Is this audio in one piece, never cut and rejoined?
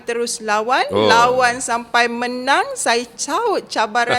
yes; 0 cuts

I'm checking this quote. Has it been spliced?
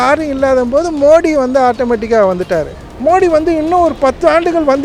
yes; 1 cut; at 2.8 s

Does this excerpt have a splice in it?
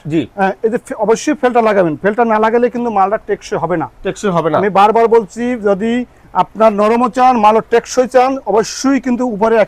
no; 0 cuts

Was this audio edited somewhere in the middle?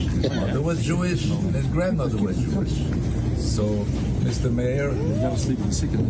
no; 0 cuts

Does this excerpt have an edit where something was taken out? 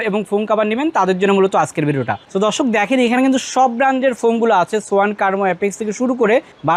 no; 0 cuts

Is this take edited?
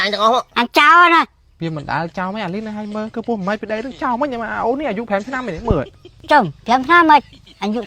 yes; 1 cut; at 1.4 s

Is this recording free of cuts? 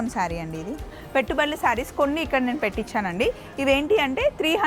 no; 1 cut; at 1.0 s

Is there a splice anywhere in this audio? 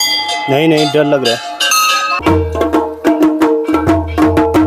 yes; 1 cut; at 2.2 s

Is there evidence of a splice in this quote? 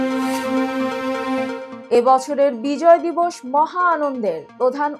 no; 0 cuts

